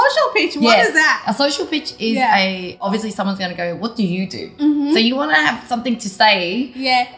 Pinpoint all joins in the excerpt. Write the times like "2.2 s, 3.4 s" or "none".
2.9 s